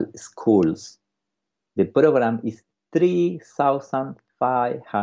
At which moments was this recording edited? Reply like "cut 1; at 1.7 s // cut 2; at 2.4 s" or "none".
none